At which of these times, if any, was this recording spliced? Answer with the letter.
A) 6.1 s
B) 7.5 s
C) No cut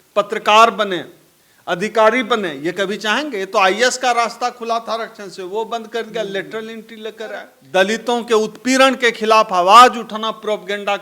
B